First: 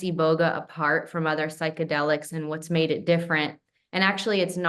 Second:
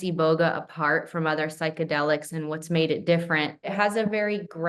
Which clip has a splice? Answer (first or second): second